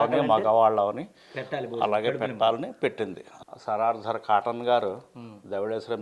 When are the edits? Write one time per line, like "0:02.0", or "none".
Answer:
0:03.3